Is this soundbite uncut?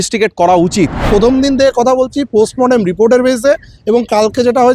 no; 1 cut; at 1.0 s

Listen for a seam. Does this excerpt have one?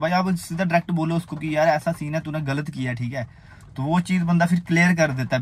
no; 0 cuts

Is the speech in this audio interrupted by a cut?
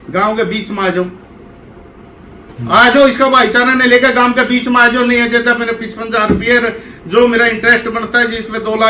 no; 0 cuts

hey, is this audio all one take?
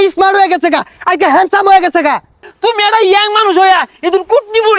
no; 1 cut; at 2.5 s

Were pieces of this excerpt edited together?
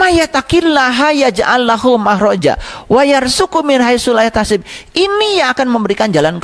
no; 0 cuts

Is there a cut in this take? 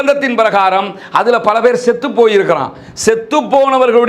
no; 0 cuts

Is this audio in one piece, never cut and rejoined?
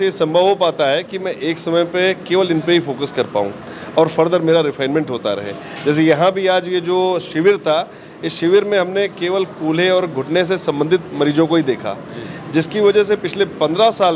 yes; 0 cuts

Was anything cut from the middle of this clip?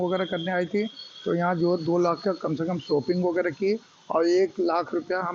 no; 0 cuts

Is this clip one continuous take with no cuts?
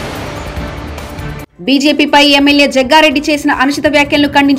no; 1 cut; at 1.4 s

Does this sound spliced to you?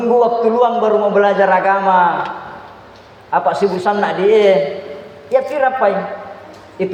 no; 0 cuts

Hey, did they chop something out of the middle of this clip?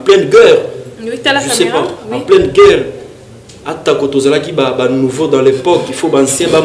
no; 0 cuts

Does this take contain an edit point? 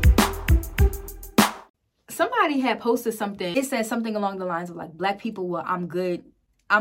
yes; 2 cuts; at 1.6 s, 3.5 s

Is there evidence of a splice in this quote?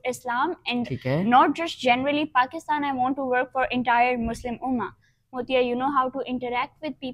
yes; 1 cut; at 5.3 s

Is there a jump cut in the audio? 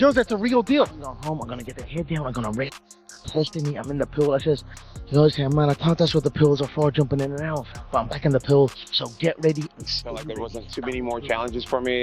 yes; 1 cut; at 10.3 s

